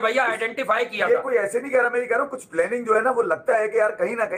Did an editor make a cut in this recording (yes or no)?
no